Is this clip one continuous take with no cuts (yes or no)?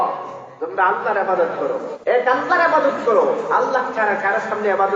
no